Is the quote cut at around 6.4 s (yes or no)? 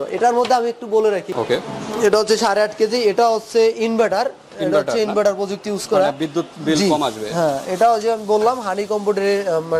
no